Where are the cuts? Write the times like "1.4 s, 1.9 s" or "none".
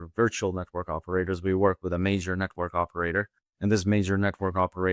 3.4 s